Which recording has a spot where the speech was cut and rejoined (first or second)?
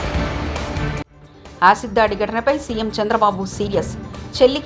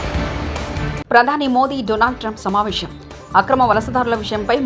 second